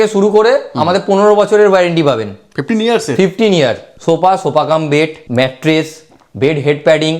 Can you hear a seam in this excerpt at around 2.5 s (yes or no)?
no